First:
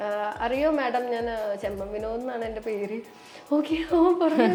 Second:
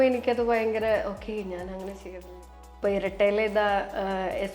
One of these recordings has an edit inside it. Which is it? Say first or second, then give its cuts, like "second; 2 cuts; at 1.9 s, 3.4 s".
second; 1 cut; at 2.8 s